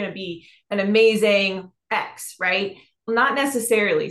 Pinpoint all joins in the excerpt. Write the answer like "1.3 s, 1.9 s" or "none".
3.0 s